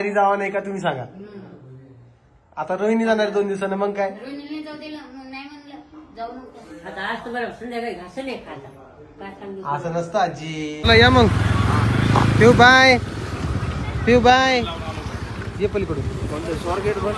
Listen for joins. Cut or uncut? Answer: cut